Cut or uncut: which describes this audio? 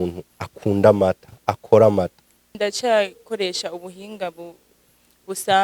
cut